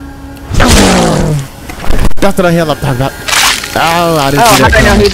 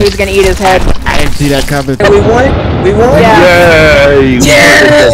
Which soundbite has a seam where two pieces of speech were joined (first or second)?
second